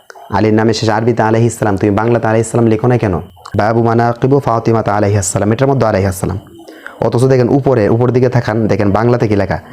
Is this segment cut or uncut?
cut